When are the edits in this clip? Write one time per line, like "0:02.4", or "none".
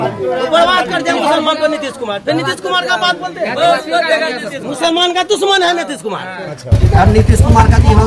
0:06.7